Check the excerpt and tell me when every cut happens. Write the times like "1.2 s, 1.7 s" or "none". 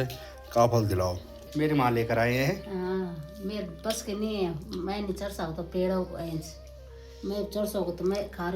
1.5 s

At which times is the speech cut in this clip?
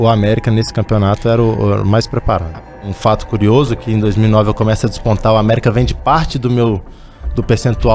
2.7 s

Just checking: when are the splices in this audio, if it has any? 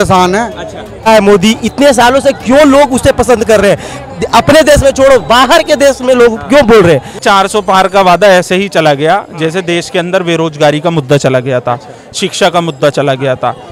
0.9 s, 7.2 s

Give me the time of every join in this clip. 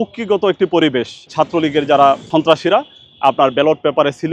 1.2 s, 2.3 s

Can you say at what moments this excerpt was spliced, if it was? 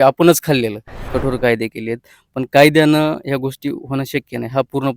1.1 s

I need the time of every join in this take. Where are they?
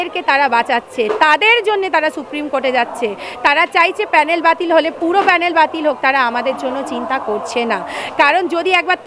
none

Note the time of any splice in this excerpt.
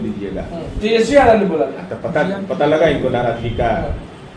none

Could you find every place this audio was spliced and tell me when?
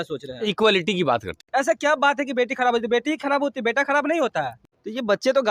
1.4 s, 4.6 s

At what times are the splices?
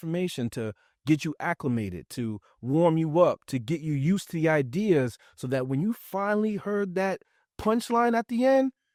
none

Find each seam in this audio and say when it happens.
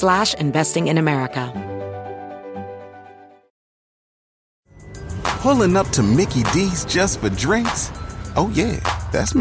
1.5 s

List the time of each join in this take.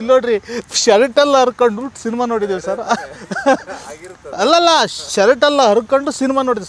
none

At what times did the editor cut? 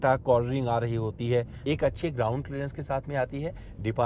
1.5 s

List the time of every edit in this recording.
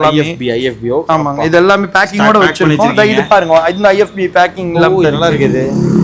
none

